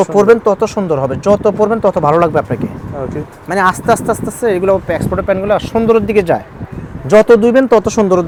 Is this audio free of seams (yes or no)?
yes